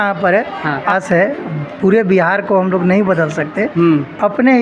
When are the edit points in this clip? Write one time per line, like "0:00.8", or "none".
0:00.9